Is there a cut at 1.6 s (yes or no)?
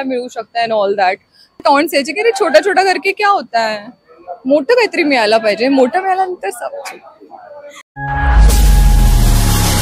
yes